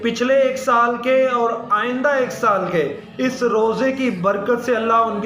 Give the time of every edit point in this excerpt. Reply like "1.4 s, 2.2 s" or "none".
none